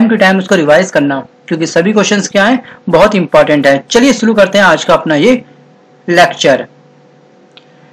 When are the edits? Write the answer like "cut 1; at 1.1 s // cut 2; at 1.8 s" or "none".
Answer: none